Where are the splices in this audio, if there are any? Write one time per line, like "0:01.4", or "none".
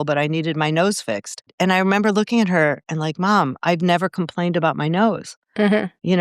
0:01.5